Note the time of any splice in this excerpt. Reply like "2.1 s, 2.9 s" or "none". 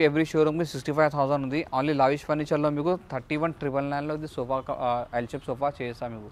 none